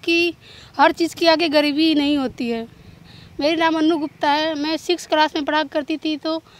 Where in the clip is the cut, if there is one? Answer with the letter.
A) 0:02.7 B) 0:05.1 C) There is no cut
C